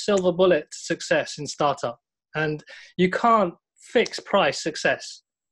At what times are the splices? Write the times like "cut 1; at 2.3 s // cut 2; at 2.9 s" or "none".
none